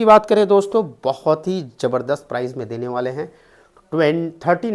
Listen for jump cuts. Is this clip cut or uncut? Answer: uncut